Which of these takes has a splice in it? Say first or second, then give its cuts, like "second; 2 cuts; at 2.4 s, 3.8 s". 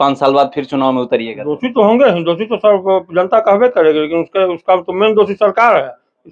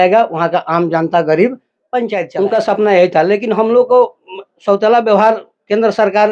second; 1 cut; at 2.2 s